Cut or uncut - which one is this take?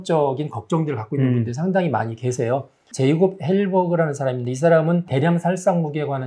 cut